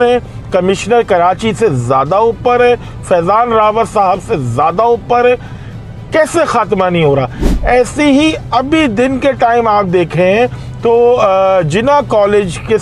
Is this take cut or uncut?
uncut